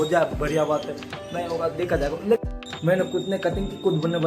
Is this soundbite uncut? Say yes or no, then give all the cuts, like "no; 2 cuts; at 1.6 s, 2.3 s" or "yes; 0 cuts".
no; 1 cut; at 2.4 s